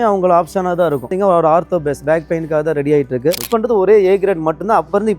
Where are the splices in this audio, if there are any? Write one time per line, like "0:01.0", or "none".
0:01.1
0:03.4